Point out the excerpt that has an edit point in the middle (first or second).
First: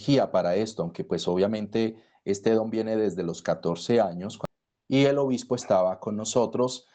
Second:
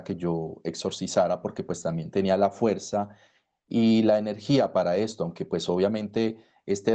first